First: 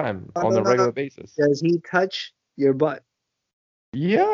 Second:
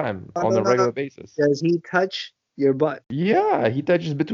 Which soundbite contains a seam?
second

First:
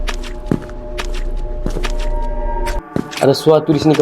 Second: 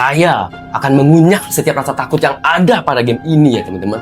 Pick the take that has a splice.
first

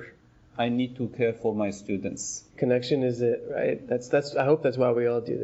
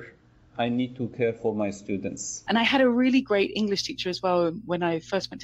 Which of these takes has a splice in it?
second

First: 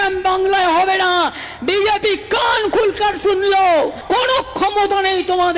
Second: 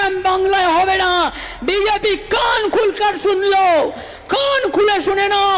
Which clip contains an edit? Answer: first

